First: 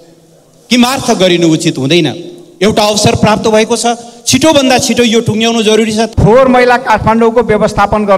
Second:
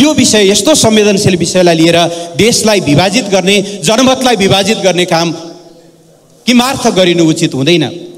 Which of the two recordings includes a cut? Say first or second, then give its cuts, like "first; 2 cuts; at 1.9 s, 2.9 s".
first; 1 cut; at 6.1 s